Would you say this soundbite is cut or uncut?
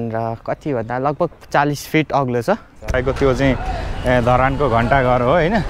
cut